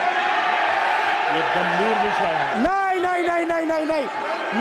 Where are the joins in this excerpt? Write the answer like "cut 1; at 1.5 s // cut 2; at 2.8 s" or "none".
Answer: cut 1; at 2.5 s